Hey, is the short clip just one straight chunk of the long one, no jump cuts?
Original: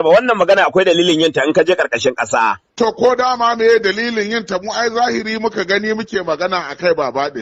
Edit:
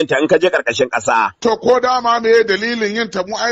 no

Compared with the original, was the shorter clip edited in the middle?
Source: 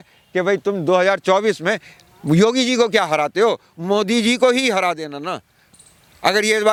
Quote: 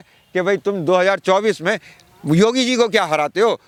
no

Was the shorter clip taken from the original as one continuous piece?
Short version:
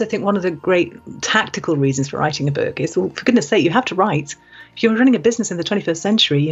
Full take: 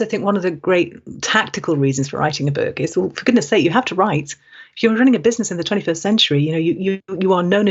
yes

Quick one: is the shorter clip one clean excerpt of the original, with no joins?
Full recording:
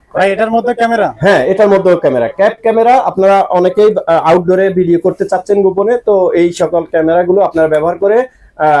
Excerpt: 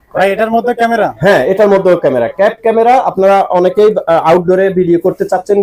yes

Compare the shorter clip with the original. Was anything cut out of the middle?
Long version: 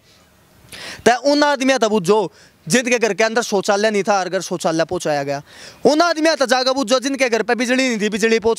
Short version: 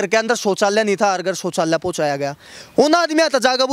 no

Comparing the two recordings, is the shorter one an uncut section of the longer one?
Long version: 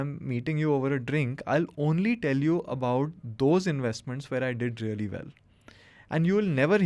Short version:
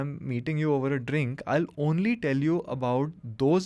yes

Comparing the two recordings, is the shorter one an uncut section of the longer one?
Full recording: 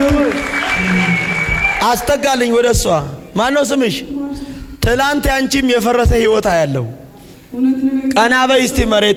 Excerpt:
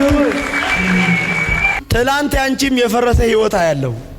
no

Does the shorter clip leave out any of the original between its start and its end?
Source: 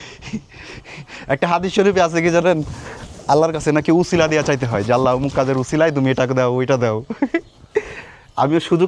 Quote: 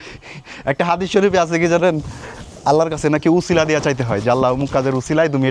no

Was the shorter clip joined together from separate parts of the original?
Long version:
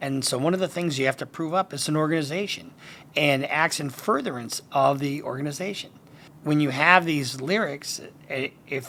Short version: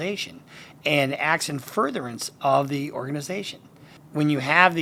no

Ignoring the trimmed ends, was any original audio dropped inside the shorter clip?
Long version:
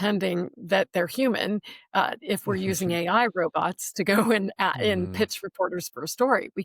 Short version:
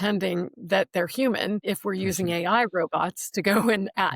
yes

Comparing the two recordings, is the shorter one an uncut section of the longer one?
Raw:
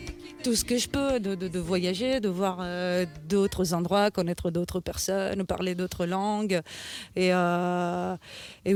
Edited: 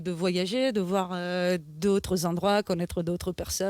yes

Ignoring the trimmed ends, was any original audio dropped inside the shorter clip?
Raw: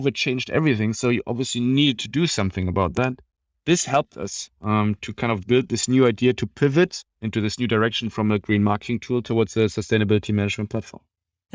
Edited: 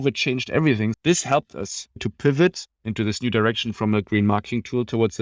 yes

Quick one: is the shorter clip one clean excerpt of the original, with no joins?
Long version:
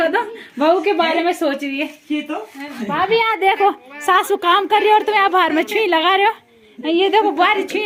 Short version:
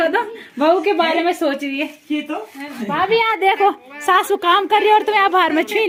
yes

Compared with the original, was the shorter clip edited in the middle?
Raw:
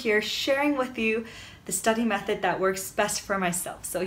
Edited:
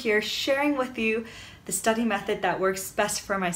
no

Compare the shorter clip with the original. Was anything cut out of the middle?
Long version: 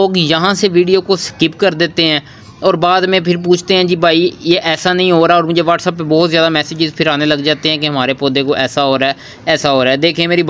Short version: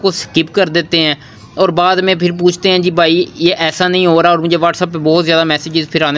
no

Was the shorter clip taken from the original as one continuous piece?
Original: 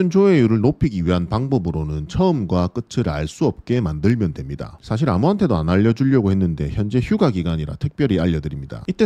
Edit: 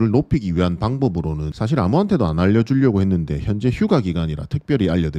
no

